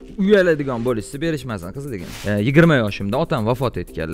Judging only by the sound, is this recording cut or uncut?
cut